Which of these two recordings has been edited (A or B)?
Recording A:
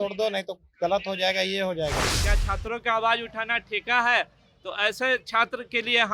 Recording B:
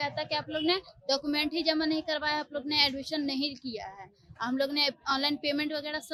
A